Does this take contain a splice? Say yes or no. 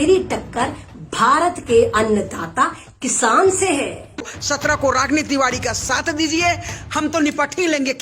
yes